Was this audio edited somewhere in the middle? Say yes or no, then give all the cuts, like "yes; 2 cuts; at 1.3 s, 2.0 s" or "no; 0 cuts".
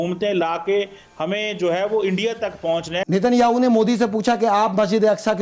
yes; 1 cut; at 3.0 s